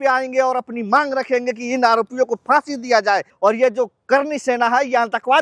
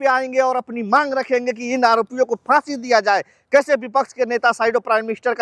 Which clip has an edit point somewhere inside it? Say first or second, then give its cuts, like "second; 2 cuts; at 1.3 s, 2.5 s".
first; 1 cut; at 3.3 s